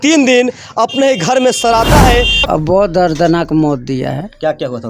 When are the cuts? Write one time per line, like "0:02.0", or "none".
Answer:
0:02.4